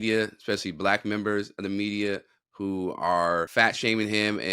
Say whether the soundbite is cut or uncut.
cut